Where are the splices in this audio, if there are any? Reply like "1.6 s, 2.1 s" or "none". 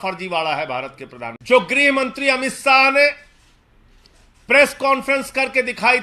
1.4 s